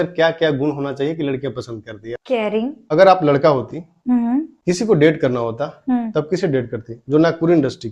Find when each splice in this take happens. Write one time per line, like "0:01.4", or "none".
0:02.8